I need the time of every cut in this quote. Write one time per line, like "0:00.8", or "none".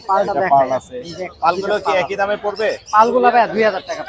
none